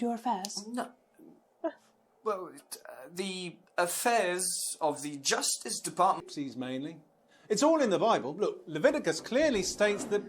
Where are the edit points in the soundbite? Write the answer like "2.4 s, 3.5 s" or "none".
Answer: 6.2 s